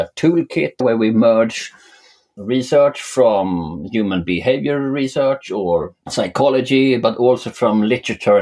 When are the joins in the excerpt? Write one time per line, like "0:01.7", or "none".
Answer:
0:00.8
0:06.0